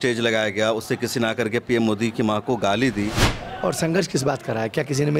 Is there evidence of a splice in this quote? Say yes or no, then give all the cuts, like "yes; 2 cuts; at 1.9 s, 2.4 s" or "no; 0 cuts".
yes; 1 cut; at 3.3 s